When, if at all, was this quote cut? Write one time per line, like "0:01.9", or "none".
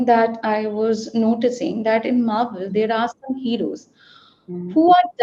none